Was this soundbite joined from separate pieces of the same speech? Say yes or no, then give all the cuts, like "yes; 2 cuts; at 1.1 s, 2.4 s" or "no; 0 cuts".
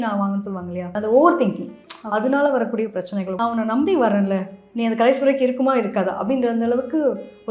yes; 2 cuts; at 1.0 s, 3.4 s